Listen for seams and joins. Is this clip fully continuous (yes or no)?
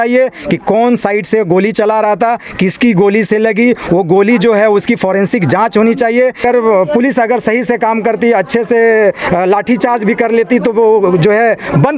no